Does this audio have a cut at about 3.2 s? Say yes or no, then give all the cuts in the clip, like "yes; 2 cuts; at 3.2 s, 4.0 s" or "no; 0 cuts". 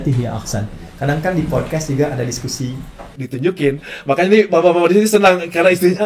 yes; 1 cut; at 3.2 s